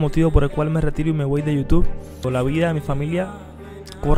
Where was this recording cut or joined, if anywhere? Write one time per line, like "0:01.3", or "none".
0:02.2